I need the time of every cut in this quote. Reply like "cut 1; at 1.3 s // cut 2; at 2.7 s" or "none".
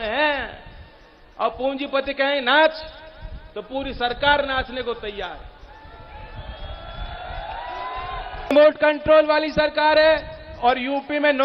cut 1; at 8.5 s